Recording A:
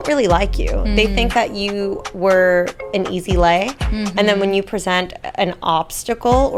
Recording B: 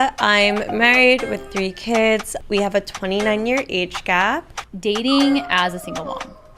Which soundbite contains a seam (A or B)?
B